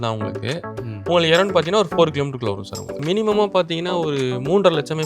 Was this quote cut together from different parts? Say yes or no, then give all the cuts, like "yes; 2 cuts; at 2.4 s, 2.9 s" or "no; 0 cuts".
yes; 1 cut; at 3.0 s